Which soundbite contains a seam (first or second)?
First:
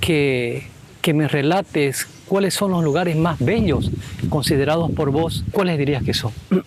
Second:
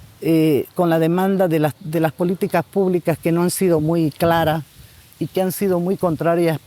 first